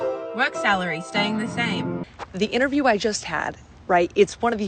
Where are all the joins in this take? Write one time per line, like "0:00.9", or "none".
0:02.0